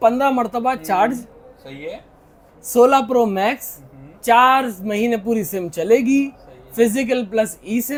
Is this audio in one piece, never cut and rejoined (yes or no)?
yes